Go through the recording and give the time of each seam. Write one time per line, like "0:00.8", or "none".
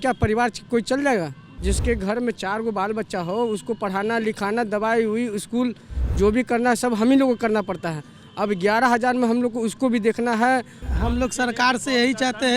0:01.5
0:10.9